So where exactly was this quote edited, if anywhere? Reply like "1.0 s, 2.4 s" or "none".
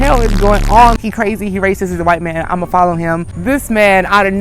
1.0 s, 3.3 s